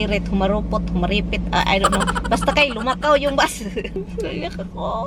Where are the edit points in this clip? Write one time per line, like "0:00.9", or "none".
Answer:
0:04.0